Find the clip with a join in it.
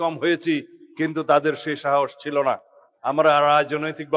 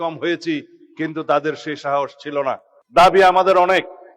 second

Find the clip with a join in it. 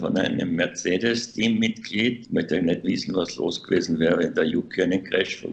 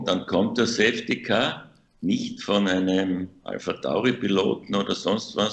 first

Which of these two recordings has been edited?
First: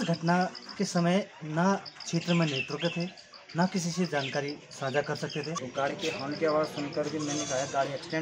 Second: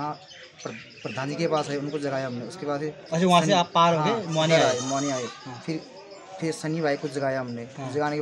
first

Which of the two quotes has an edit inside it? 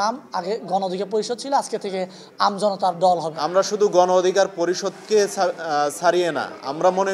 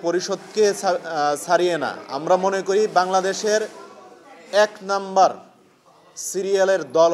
first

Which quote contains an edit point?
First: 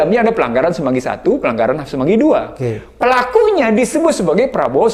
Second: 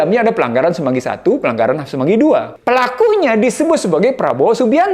second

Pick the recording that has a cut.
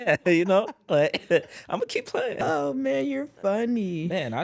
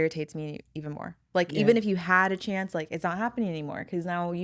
first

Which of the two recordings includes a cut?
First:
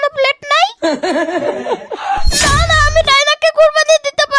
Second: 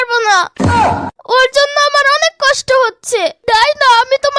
first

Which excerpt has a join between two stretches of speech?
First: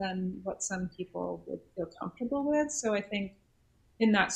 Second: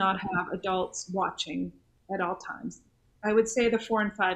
second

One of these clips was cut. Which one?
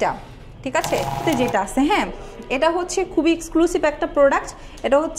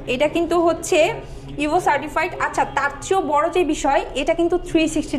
first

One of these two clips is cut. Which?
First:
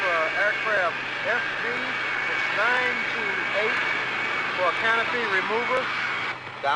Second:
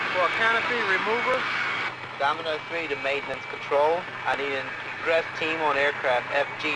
second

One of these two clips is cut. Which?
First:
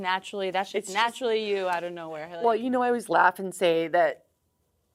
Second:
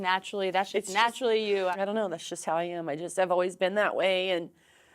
second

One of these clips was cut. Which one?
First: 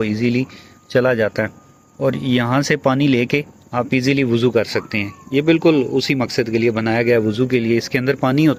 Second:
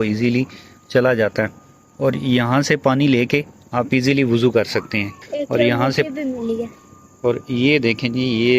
second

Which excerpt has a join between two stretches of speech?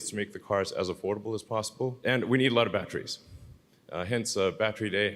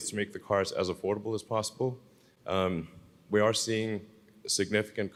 first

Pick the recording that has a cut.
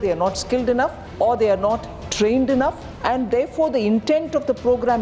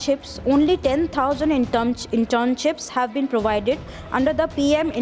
first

